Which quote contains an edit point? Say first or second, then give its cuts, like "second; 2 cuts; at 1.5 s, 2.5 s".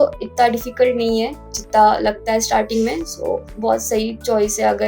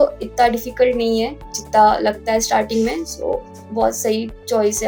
first; 1 cut; at 3.9 s